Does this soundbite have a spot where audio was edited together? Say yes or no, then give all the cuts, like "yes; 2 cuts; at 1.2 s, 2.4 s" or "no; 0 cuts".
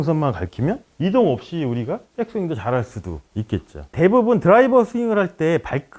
yes; 1 cut; at 3.9 s